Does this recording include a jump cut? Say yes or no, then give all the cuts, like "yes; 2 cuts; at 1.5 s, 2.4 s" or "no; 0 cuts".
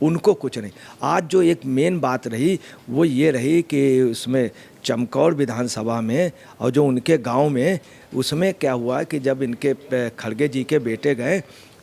no; 0 cuts